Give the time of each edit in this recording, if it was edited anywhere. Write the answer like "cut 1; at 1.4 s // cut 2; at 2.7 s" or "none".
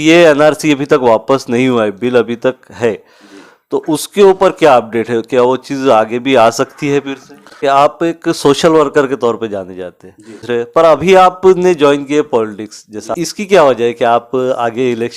cut 1; at 7.5 s // cut 2; at 10.4 s // cut 3; at 13.1 s